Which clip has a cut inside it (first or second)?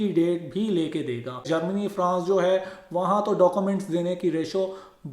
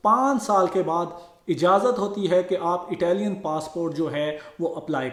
first